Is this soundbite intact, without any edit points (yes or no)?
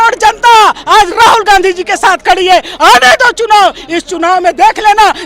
yes